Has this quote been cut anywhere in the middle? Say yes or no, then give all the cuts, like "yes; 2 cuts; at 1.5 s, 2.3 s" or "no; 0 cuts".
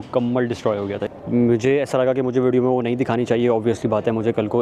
yes; 1 cut; at 1.1 s